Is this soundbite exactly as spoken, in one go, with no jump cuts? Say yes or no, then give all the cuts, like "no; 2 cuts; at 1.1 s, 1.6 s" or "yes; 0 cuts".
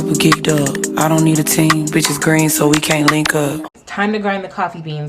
no; 1 cut; at 3.7 s